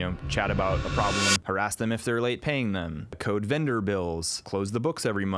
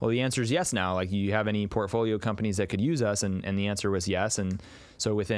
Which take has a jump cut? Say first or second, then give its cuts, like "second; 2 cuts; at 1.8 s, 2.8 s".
first; 3 cuts; at 1.4 s, 3.2 s, 4.3 s